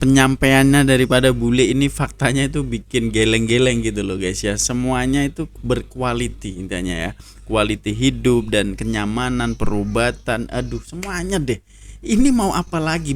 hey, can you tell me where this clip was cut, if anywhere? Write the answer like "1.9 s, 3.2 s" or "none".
none